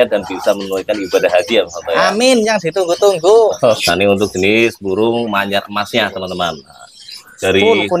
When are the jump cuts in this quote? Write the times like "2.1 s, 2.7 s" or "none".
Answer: 3.7 s